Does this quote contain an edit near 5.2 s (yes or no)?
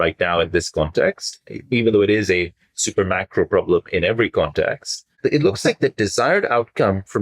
yes